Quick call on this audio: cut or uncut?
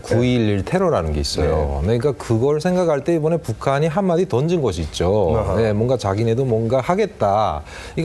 cut